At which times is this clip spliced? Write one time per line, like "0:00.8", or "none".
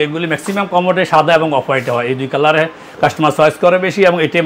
none